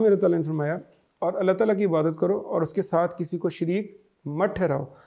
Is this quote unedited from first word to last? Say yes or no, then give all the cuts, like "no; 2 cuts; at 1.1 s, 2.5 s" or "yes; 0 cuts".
yes; 0 cuts